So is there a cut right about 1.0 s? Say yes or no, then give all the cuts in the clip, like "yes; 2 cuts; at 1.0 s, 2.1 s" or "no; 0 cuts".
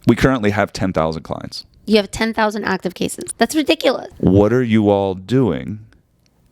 no; 2 cuts; at 3.2 s, 4.1 s